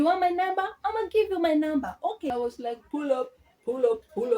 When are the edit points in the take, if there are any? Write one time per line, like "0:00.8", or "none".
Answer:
0:02.3